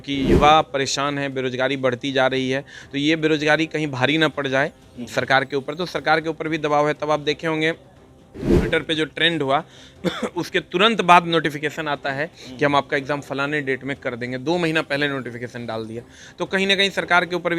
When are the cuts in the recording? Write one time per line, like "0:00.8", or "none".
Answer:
none